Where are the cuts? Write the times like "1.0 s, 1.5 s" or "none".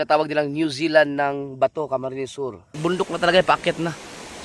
2.7 s